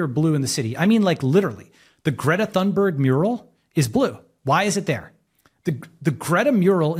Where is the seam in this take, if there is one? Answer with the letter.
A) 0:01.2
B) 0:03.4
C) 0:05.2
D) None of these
D